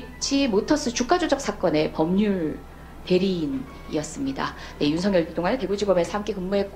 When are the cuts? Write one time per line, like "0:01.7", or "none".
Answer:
none